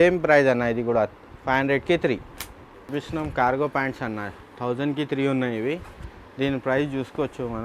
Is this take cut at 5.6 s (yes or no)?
no